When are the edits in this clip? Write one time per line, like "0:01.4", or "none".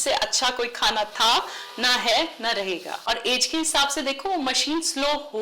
0:02.9